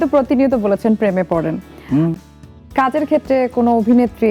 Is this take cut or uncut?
uncut